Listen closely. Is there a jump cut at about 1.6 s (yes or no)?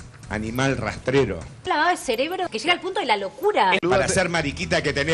no